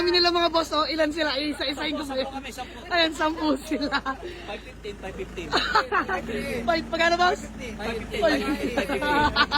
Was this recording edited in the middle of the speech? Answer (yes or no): no